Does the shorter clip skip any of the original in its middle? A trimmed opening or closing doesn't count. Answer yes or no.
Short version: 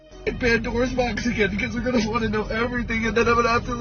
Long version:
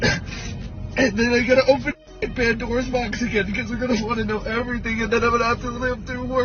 no